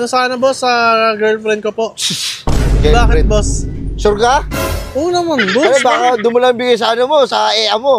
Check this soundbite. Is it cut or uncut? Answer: uncut